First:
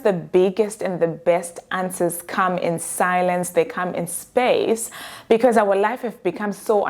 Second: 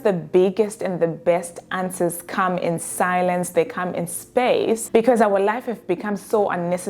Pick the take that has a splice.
second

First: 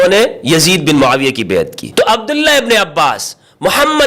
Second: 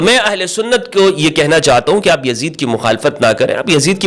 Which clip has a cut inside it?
first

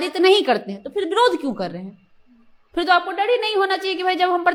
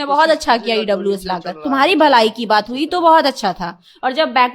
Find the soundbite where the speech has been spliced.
second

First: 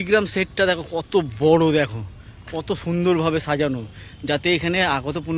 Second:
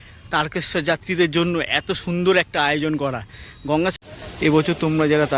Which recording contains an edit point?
second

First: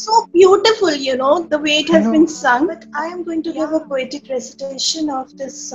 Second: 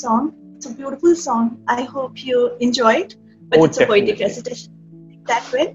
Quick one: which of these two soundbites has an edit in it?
first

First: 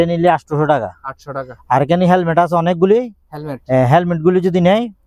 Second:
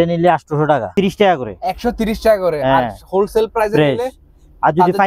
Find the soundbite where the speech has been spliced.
second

